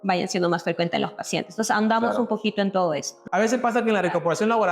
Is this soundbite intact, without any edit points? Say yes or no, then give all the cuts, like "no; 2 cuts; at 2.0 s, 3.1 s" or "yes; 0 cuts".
no; 1 cut; at 3.1 s